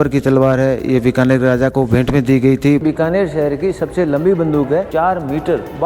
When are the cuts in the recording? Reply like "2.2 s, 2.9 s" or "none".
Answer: 2.8 s, 4.9 s

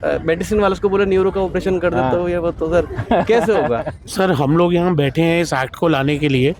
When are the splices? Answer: 4.0 s

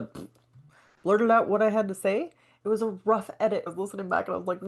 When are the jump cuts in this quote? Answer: 2.5 s, 3.7 s

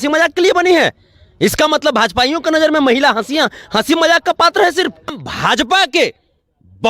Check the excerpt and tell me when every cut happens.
5.2 s

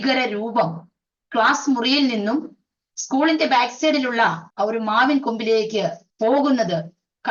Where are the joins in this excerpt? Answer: 4.4 s, 6.0 s

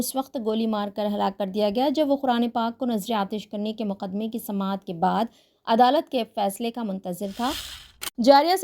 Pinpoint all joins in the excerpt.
7.7 s

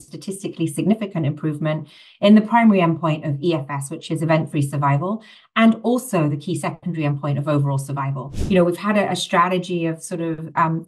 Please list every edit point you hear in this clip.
8.3 s

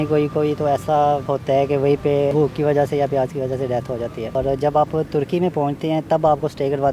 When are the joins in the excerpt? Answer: 1.2 s, 2.3 s, 4.3 s

